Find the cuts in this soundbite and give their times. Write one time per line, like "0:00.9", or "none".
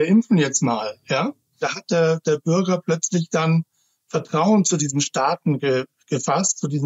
0:01.7